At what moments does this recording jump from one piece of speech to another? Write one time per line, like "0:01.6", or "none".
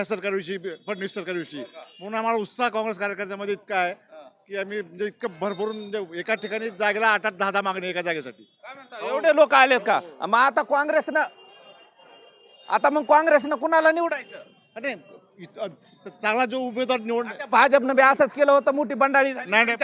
none